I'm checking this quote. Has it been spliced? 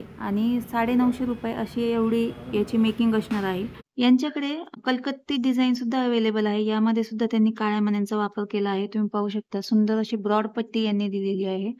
yes; 2 cuts; at 3.8 s, 4.8 s

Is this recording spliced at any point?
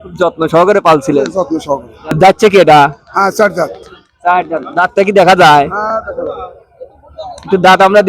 yes; 1 cut; at 2.0 s

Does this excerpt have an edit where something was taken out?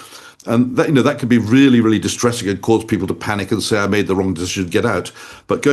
no; 0 cuts

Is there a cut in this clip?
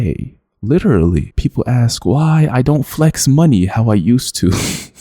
yes; 1 cut; at 1.3 s

